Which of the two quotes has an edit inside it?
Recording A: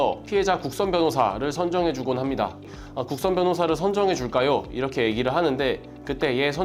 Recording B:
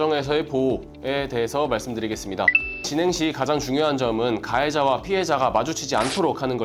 A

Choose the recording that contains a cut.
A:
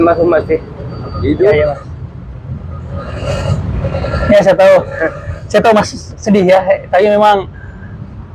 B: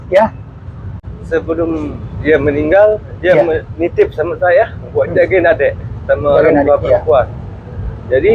B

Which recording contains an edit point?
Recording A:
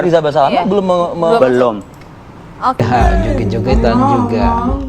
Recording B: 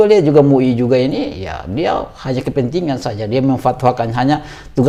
A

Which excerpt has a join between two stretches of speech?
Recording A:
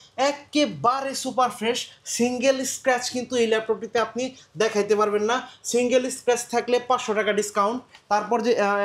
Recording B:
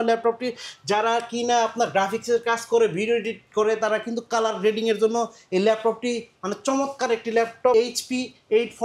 B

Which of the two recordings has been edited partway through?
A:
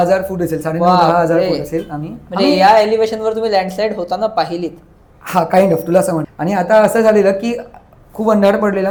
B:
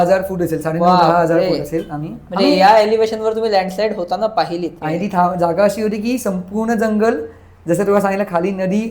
B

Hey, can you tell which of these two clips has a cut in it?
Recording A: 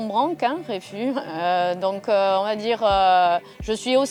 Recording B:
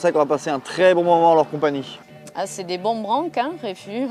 B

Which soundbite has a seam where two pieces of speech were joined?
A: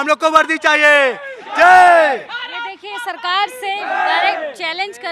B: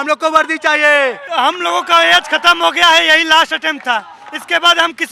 B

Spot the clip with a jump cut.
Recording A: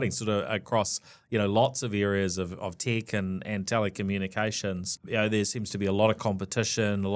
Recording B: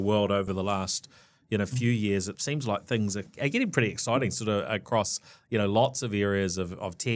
B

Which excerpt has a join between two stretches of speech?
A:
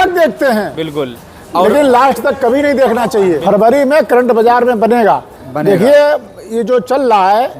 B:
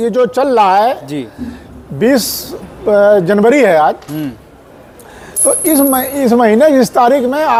A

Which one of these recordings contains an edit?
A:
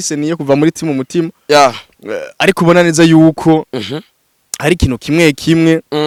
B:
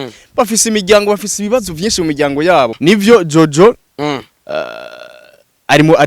B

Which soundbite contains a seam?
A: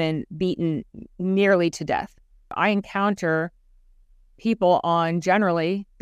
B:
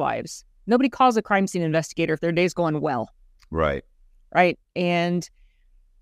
A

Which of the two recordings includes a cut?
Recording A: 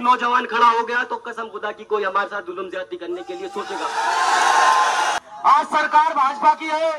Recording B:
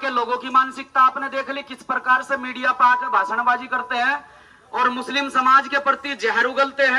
A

